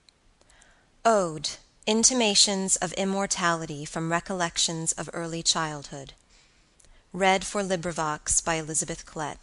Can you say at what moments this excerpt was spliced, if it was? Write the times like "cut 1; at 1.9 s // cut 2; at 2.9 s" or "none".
none